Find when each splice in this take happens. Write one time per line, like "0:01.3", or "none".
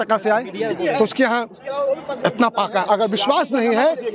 none

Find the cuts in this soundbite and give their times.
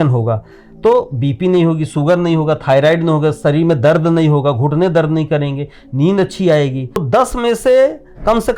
0:07.0

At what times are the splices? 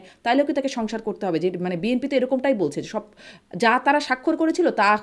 none

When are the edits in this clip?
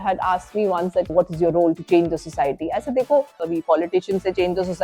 0:01.1
0:03.5

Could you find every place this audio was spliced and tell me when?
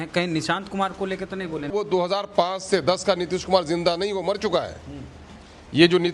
0:01.7

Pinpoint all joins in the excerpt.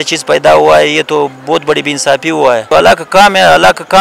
0:02.7

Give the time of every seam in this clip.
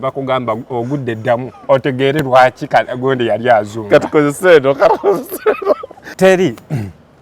0:06.0

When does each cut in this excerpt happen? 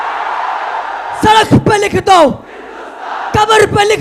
0:01.1

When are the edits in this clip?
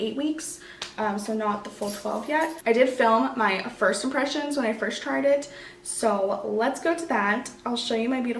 none

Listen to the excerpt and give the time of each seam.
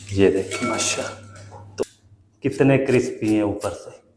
0:01.8

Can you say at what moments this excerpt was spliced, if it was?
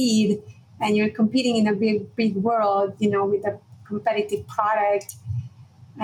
none

